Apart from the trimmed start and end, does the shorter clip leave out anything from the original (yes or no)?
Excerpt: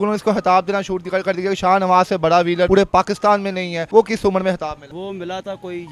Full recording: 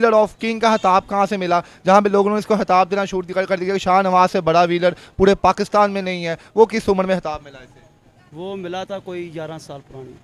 yes